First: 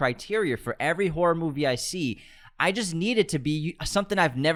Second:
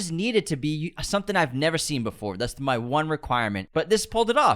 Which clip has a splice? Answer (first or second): second